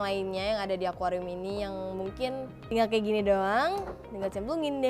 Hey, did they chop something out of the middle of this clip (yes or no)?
yes